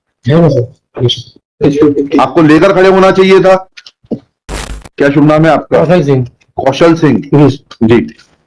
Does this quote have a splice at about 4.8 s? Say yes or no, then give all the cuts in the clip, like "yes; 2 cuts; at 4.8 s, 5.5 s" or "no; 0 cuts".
yes; 1 cut; at 4.8 s